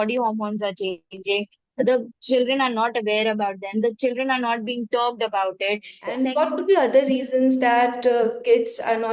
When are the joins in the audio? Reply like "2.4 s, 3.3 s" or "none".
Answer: 6.0 s